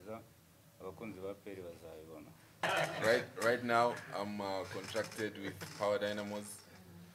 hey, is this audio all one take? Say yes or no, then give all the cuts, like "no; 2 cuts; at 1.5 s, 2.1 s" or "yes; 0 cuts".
no; 1 cut; at 2.6 s